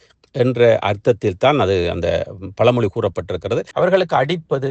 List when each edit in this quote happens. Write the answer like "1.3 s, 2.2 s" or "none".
3.7 s